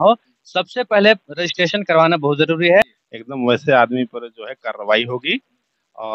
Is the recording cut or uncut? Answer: cut